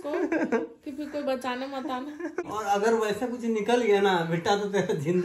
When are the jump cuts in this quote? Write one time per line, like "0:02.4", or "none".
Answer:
0:02.4